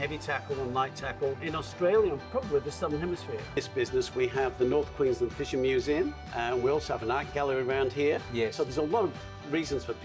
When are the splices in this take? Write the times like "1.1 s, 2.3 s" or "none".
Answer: 1.4 s, 2.2 s, 3.6 s, 6.2 s